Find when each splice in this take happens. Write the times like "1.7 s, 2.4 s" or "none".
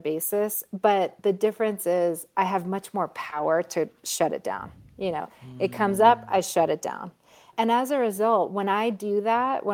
1.1 s, 7.5 s

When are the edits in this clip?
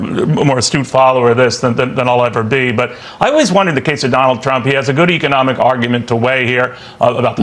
none

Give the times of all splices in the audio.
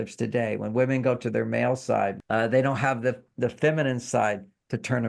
2.2 s

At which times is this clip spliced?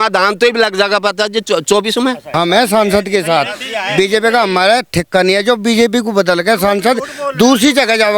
2.2 s

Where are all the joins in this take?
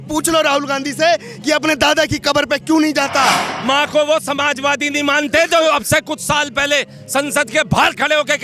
3.5 s

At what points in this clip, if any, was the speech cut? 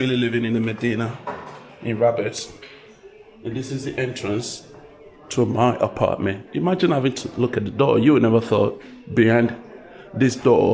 none

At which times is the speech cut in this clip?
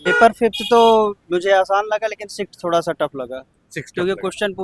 none

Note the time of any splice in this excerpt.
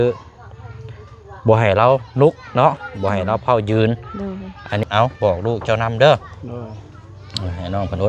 4.8 s

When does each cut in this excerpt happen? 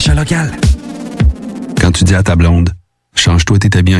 1.8 s

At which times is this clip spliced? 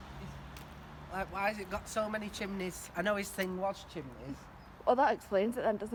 none

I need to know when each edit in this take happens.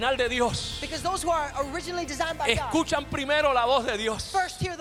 none

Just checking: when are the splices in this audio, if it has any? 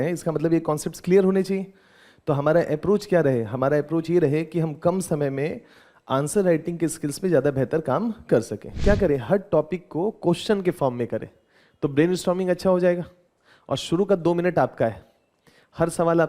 8.8 s

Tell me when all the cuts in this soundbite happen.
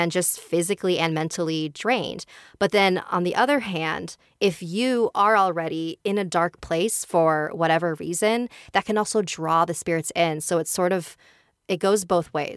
none

